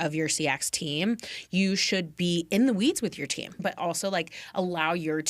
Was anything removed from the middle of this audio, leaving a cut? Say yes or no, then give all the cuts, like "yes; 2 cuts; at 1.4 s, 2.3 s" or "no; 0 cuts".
yes; 1 cut; at 3.6 s